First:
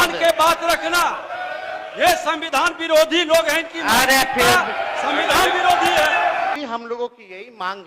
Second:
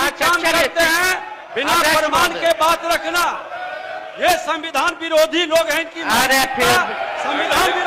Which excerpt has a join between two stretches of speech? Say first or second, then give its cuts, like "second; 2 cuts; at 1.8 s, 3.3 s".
first; 1 cut; at 6.6 s